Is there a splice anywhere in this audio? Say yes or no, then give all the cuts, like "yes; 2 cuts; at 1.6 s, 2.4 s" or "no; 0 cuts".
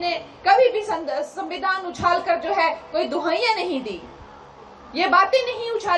no; 0 cuts